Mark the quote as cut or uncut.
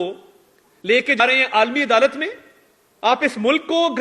cut